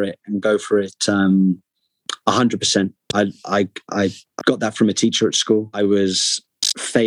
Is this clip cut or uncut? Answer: cut